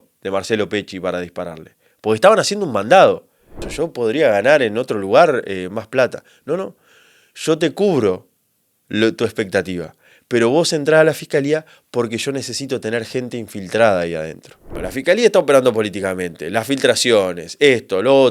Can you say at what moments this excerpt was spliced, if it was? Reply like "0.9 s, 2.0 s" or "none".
3.7 s, 14.9 s